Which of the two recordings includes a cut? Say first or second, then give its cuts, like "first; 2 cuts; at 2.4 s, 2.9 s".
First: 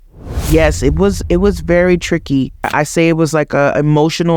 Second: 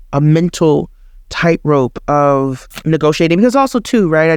first; 1 cut; at 2.7 s